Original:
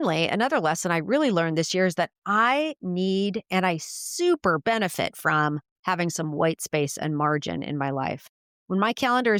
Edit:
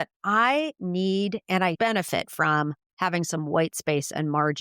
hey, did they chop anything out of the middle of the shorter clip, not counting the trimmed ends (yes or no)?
yes